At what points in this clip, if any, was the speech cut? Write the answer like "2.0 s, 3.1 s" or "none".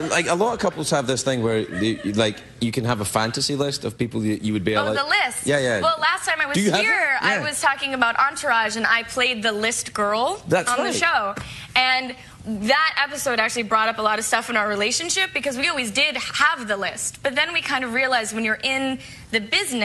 none

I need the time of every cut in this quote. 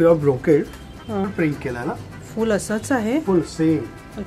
1.3 s

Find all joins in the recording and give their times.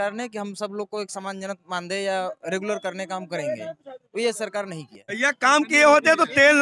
5.2 s

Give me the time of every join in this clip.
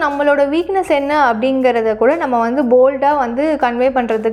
none

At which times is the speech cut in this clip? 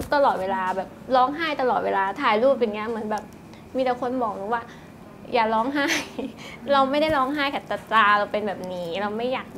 none

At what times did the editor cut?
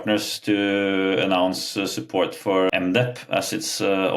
2.7 s

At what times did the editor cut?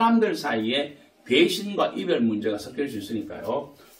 none

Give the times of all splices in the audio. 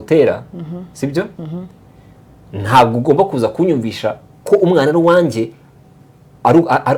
none

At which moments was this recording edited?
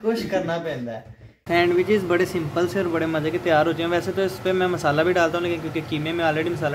1.5 s

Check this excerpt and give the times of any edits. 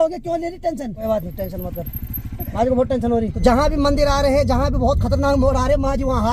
1.0 s, 3.4 s

